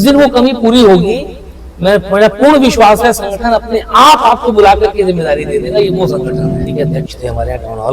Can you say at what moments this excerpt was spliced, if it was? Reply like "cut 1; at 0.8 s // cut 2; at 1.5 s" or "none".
cut 1; at 6.6 s